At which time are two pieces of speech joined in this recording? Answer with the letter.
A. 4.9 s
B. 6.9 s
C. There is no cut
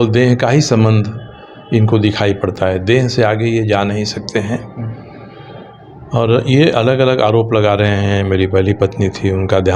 C